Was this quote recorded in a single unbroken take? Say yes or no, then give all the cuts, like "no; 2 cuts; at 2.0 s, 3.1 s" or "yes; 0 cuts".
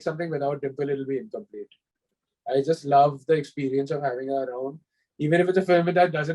yes; 0 cuts